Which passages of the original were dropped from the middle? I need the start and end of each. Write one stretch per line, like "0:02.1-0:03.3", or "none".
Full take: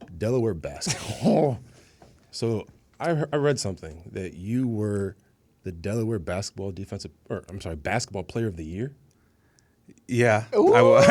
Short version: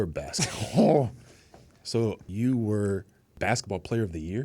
0:02.7-0:04.4
0:05.3-0:07.7